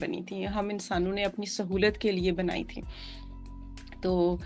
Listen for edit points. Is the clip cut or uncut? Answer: uncut